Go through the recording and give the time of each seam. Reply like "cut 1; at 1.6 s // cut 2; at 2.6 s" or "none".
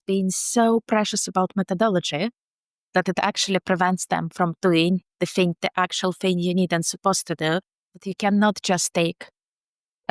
cut 1; at 7.9 s